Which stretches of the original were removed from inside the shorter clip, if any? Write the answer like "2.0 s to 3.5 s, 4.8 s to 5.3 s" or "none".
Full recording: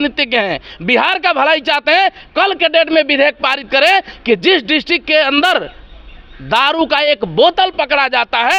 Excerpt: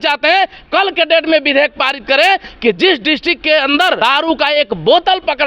5.6 s to 6.5 s

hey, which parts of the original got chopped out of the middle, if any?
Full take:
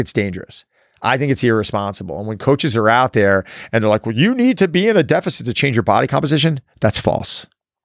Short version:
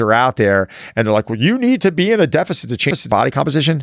none

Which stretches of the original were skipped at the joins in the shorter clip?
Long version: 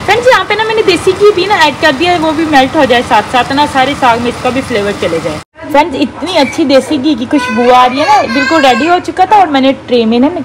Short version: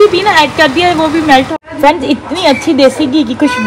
2.7 s to 5.4 s

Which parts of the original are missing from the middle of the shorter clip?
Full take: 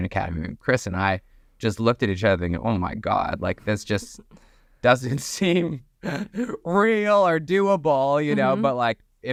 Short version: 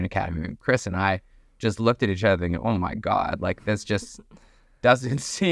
none

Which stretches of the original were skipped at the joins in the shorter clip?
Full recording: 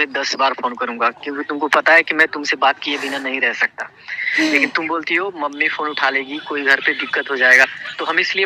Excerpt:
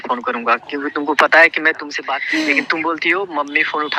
2.4 s to 4.0 s

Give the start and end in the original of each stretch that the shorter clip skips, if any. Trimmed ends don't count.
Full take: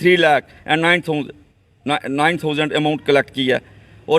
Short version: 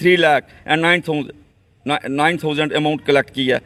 none

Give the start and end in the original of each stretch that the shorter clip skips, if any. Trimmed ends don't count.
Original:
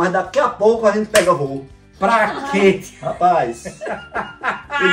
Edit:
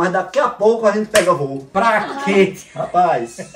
1.6 s to 1.8 s

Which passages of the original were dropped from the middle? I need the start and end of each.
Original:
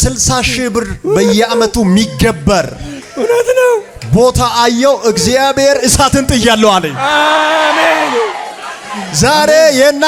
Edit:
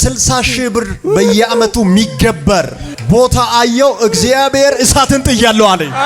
2.9 s to 3.9 s

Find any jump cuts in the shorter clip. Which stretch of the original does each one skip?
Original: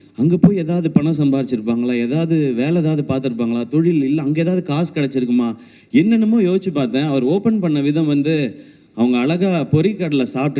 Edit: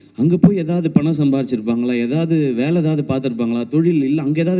none

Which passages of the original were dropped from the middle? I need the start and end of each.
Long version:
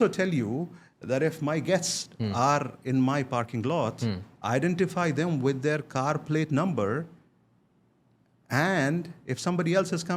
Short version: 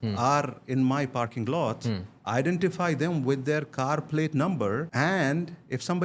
7.1 s to 8.5 s

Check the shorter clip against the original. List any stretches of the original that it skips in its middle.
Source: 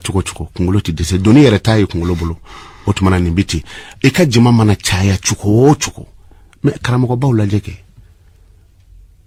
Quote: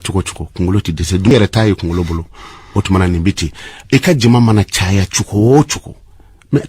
1.3 s to 1.4 s

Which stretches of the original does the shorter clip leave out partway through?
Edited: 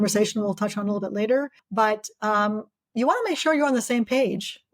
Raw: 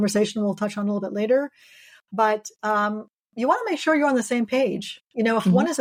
1.6 s to 2.0 s

